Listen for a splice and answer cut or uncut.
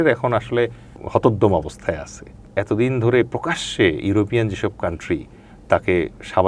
cut